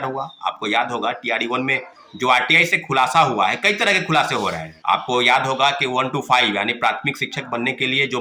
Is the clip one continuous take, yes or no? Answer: no